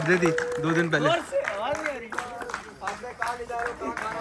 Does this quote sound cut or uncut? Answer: uncut